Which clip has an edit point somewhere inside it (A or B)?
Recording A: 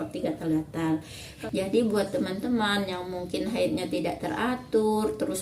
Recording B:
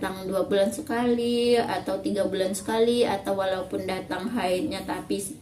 A